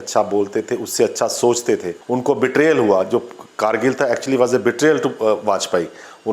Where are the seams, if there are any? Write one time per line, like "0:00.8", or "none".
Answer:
0:02.0